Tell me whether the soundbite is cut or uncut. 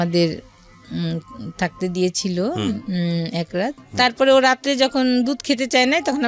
cut